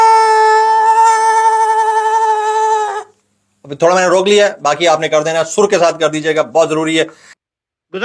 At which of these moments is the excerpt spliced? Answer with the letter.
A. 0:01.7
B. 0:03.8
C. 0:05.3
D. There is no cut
D